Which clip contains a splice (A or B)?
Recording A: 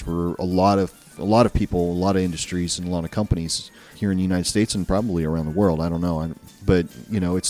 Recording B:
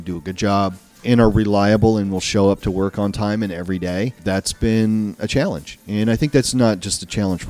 B